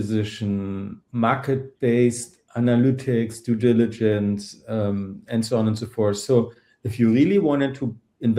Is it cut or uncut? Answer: cut